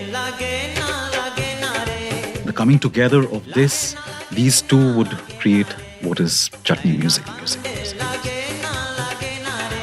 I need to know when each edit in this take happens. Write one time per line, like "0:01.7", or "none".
0:02.5
0:07.3